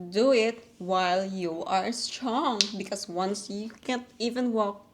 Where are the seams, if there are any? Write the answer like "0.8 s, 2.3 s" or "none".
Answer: none